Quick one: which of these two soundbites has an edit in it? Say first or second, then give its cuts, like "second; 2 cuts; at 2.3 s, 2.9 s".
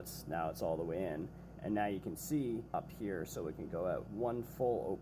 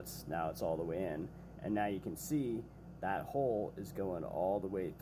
first; 2 cuts; at 2.7 s, 4.1 s